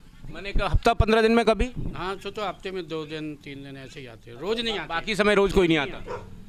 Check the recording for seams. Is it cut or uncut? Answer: uncut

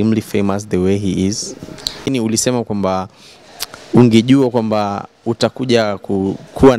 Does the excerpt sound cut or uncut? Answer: cut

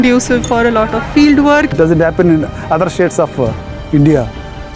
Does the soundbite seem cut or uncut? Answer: cut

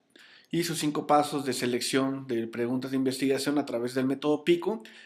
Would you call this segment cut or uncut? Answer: uncut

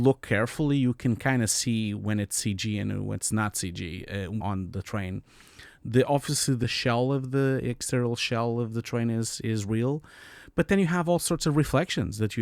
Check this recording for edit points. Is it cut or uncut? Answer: cut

